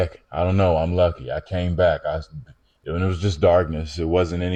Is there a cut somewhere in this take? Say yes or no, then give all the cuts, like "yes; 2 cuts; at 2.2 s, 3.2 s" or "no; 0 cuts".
no; 0 cuts